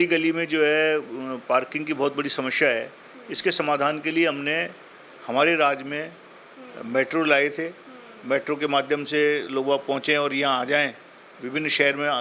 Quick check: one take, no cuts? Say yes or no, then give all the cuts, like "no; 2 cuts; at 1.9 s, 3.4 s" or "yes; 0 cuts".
yes; 0 cuts